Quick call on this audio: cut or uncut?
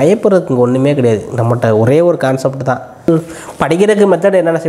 cut